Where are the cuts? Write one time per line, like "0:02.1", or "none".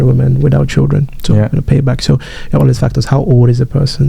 none